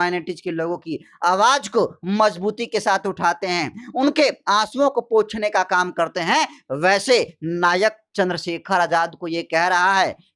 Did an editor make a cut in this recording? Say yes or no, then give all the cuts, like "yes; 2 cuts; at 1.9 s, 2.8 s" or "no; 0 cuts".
no; 0 cuts